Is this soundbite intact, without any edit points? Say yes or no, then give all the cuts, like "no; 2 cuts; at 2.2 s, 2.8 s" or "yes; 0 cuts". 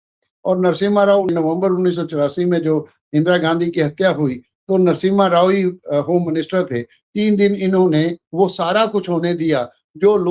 no; 1 cut; at 1.3 s